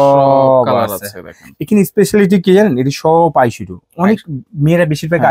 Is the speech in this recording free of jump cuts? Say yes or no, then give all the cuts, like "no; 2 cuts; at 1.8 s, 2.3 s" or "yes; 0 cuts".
yes; 0 cuts